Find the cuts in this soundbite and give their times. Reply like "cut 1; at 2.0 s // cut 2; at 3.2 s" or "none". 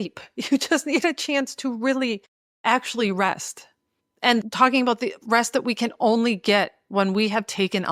cut 1; at 4.4 s